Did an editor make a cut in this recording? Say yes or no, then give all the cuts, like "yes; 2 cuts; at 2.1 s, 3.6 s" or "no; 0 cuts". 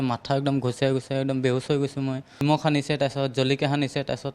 yes; 1 cut; at 2.4 s